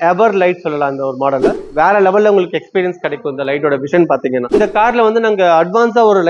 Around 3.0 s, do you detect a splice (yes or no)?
no